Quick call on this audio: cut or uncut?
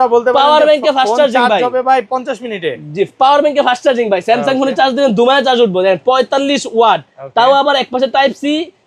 uncut